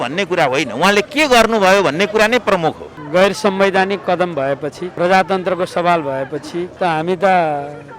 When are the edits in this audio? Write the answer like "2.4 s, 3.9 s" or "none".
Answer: 2.9 s, 4.8 s, 6.7 s